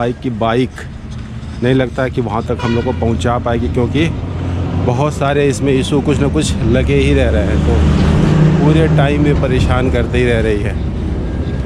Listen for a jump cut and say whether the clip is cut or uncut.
uncut